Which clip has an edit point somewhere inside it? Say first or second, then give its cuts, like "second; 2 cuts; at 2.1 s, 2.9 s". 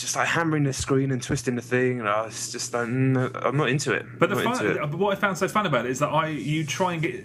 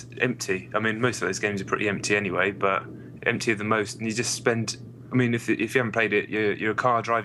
first; 1 cut; at 2.3 s